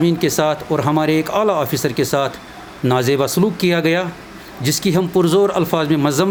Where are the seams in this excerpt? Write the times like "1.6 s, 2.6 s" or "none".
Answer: none